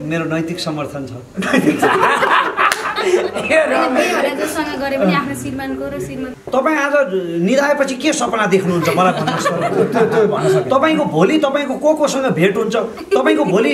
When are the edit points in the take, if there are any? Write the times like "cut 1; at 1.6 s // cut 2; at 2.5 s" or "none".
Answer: cut 1; at 6.3 s